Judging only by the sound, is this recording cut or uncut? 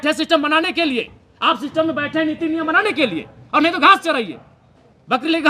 uncut